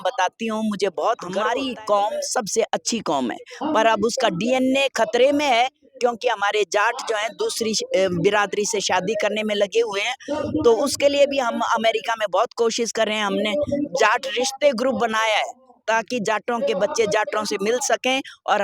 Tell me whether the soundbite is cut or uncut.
cut